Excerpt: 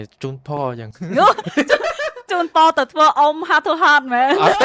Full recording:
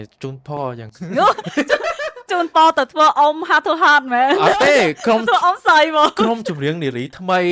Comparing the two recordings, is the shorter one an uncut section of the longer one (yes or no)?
yes